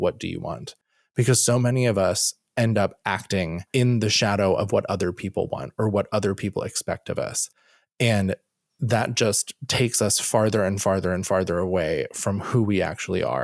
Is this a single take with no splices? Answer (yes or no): yes